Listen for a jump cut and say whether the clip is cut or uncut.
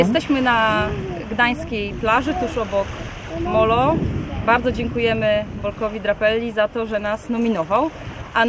uncut